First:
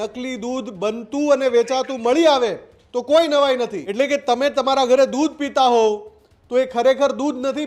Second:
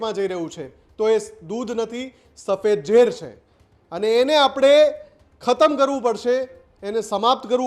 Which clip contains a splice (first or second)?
first